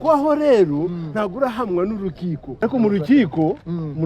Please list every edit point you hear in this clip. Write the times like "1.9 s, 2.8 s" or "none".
2.6 s